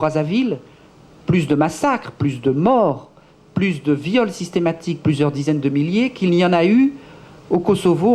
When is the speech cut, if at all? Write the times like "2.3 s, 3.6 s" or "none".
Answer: none